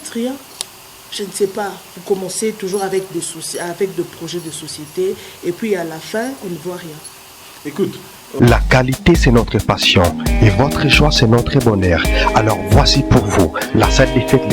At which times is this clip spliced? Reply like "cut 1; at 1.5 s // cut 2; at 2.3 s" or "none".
cut 1; at 8.4 s